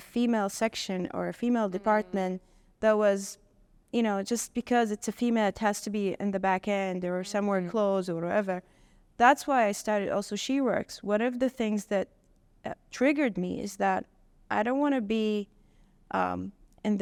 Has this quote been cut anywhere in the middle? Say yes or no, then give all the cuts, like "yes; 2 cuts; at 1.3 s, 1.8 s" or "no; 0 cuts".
no; 0 cuts